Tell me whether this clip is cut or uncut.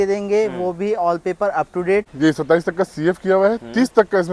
cut